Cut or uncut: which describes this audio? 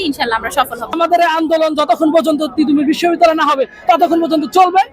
cut